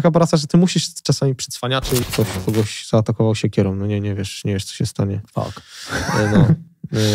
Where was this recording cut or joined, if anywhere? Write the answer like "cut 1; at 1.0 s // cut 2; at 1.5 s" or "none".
cut 1; at 2.1 s

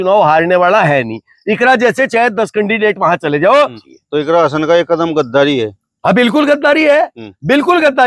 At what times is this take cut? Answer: cut 1; at 3.8 s

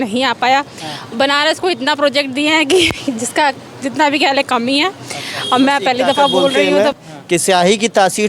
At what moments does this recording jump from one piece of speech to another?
cut 1; at 6.7 s

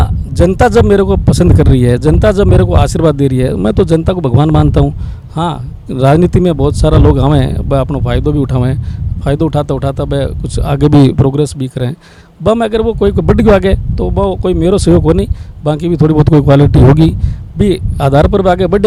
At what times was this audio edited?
none

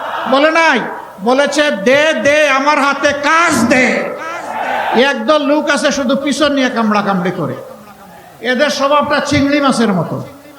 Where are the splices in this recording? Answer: cut 1; at 4.9 s

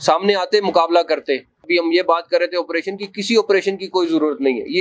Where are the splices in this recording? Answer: cut 1; at 1.7 s

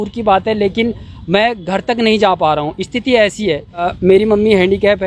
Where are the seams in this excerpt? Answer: cut 1; at 3.9 s

